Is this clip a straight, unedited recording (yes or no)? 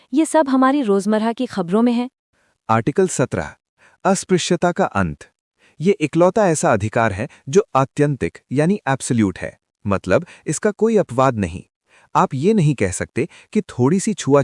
yes